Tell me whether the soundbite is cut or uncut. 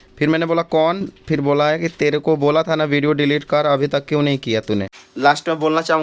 cut